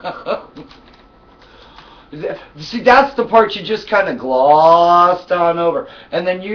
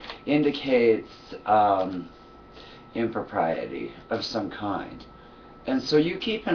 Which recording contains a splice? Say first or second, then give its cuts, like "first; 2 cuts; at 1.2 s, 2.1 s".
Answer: second; 1 cut; at 3.6 s